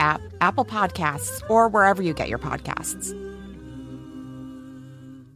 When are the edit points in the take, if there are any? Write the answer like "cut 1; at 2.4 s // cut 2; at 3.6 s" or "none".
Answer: cut 1; at 2.8 s